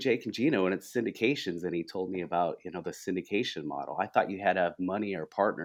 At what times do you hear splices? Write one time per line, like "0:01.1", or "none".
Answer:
none